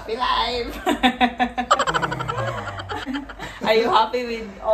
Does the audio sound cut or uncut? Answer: cut